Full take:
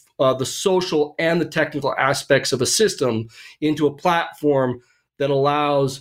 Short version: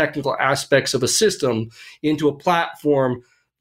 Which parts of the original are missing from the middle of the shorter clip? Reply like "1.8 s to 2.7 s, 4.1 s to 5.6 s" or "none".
none